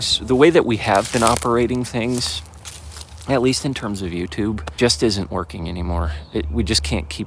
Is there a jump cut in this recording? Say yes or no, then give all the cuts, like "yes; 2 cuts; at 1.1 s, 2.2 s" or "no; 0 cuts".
no; 0 cuts